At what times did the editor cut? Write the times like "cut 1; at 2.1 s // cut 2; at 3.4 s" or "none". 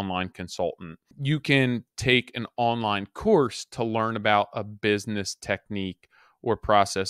cut 1; at 1.1 s

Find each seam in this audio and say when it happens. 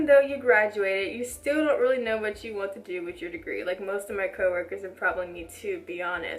none

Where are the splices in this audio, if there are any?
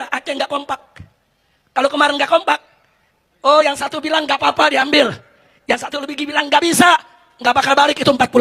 none

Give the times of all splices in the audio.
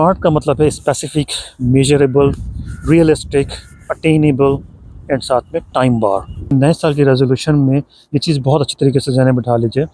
cut 1; at 6.5 s

